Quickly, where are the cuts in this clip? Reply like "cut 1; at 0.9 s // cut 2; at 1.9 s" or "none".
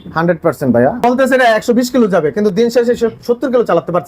cut 1; at 1.0 s